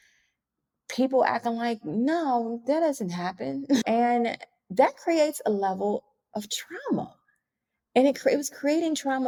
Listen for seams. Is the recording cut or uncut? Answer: uncut